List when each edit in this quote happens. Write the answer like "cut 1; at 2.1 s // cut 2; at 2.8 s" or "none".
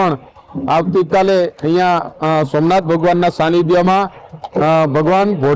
none